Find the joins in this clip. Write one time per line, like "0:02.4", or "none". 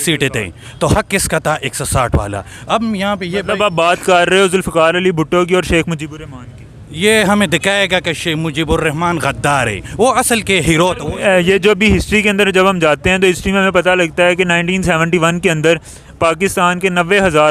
0:11.0

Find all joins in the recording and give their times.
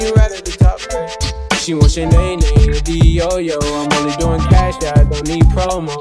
0:05.0

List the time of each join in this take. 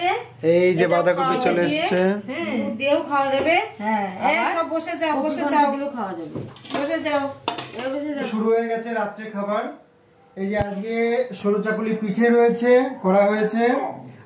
none

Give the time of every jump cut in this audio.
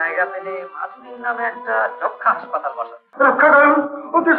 0:03.0

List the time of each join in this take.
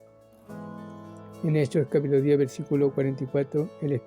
0:01.3

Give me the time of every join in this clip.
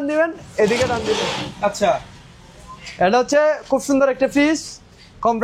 none

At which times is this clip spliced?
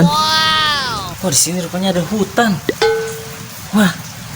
0:01.1

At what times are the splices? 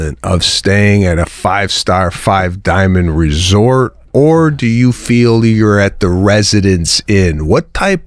none

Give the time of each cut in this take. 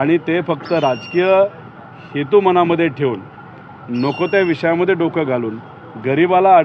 none

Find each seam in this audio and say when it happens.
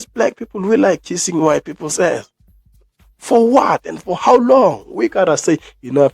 none

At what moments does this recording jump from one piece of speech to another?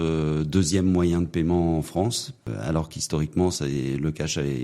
0:02.5

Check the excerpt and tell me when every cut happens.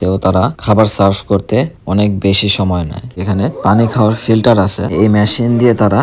0:03.2
0:04.9

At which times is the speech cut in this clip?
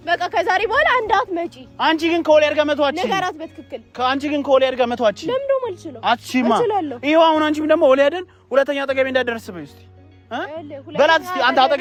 none

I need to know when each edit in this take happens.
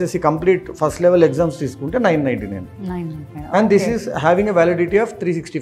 none

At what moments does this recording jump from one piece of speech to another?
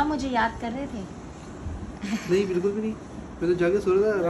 none

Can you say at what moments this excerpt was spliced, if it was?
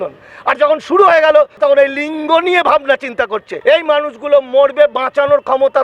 0:01.6
0:03.5

